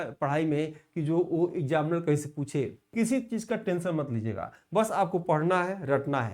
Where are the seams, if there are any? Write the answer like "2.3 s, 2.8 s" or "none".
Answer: 2.8 s